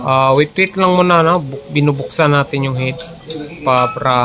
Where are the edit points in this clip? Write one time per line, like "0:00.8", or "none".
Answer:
none